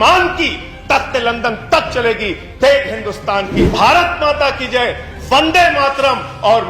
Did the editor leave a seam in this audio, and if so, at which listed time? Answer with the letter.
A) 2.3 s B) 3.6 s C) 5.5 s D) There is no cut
B